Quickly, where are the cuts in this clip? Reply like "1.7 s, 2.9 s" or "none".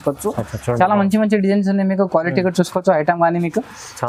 none